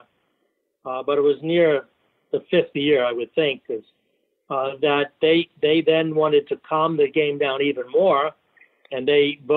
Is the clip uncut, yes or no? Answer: yes